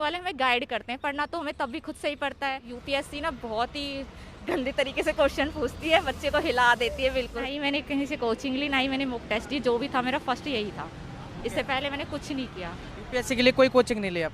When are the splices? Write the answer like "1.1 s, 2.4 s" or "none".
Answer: 2.7 s, 7.5 s